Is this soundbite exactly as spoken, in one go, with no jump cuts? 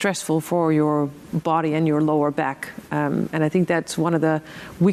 yes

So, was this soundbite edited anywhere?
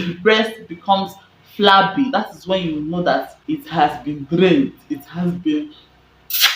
yes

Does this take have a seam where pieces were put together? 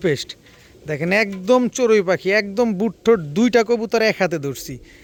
no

